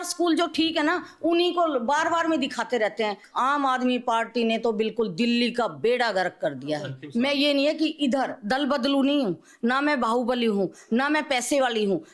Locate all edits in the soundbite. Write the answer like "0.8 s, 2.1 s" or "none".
3.2 s, 7.0 s